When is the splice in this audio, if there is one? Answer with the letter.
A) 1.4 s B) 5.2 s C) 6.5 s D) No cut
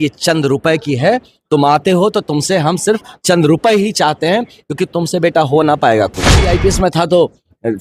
C